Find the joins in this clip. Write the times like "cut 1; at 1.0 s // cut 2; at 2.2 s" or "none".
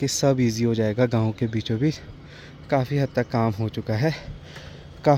none